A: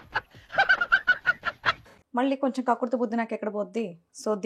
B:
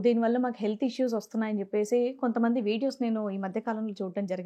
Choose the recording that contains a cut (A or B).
A